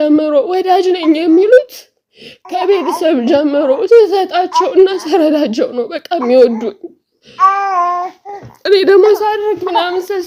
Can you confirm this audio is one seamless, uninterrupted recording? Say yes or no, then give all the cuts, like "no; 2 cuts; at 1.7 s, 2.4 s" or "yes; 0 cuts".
yes; 0 cuts